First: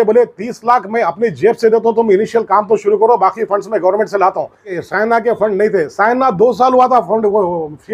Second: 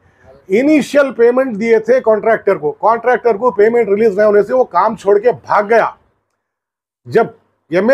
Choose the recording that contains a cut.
first; 1 cut; at 4.8 s

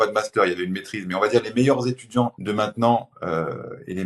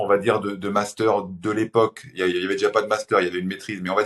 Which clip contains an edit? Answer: first; 1 cut; at 2.4 s

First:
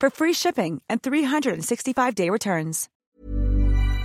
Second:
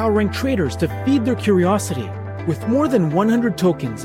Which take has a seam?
first; 1 cut; at 2.9 s

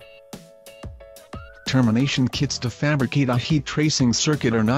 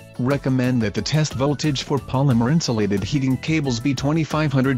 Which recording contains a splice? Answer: first; 1 cut; at 1.7 s

